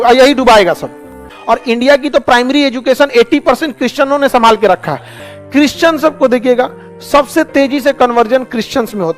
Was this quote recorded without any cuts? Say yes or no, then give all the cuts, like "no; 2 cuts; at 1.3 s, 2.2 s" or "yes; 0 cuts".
no; 2 cuts; at 1.3 s, 5.3 s